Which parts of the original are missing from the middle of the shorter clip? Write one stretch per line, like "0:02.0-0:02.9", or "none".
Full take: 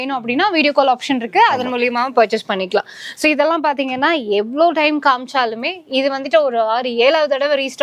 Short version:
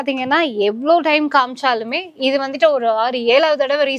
none